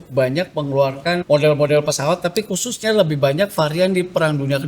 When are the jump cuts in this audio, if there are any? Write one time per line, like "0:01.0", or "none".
0:01.2